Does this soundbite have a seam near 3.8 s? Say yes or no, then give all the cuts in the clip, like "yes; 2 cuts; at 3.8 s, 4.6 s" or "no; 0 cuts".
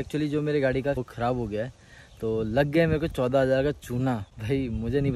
no; 1 cut; at 1.0 s